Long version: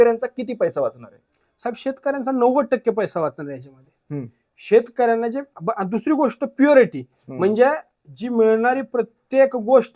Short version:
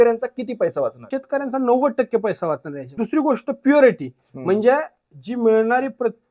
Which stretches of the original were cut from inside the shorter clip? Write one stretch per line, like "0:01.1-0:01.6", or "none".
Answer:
0:01.0-0:01.8
0:03.7-0:05.9